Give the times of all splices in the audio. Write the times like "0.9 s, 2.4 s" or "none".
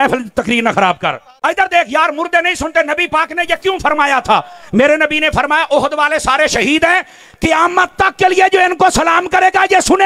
1.3 s